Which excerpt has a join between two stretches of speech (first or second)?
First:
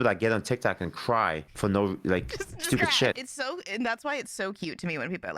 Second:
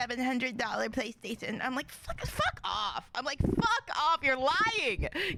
first